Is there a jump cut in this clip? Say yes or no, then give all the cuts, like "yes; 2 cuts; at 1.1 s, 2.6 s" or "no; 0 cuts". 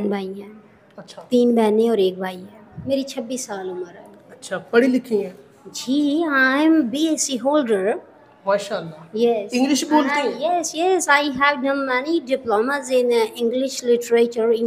yes; 1 cut; at 2.7 s